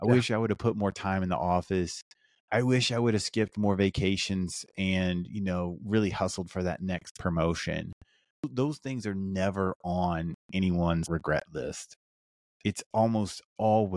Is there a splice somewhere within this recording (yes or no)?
yes